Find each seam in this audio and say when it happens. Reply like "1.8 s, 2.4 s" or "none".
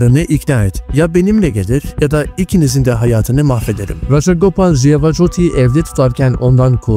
3.9 s

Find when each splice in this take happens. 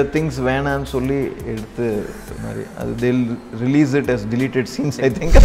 none

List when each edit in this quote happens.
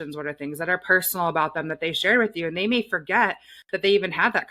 none

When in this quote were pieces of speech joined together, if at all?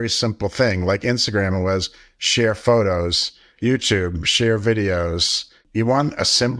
5.6 s

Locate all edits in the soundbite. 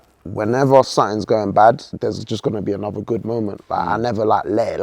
1.9 s

